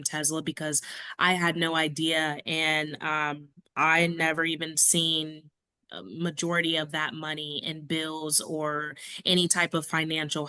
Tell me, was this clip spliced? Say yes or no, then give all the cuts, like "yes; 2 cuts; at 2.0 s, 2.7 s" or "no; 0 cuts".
no; 0 cuts